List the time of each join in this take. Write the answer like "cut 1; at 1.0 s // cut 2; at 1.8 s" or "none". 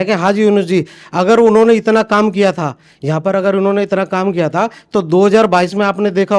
none